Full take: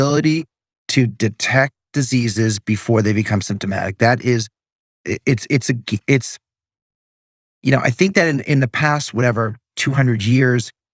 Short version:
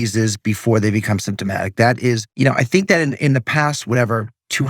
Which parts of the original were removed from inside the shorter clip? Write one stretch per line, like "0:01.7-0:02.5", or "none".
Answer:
0:04.5-0:07.5